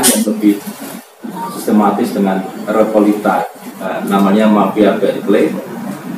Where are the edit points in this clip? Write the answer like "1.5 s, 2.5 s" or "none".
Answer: 4.0 s